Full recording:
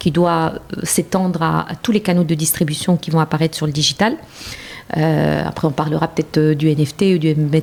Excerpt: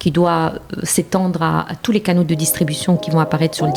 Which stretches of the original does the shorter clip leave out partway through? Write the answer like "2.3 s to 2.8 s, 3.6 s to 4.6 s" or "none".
none